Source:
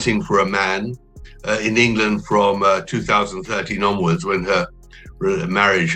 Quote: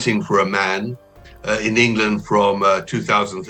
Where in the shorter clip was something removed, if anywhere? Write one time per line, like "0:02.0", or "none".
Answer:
none